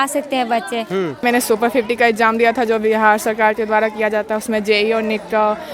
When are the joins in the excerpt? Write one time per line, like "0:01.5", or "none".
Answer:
0:01.2